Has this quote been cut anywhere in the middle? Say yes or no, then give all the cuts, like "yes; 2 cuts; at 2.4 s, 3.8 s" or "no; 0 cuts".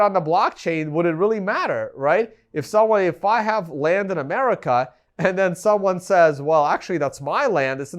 no; 0 cuts